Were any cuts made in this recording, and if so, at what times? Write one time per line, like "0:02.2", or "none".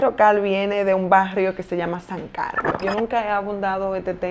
0:02.8